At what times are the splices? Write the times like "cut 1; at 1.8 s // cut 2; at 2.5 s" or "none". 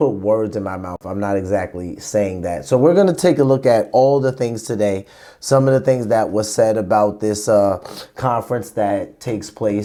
none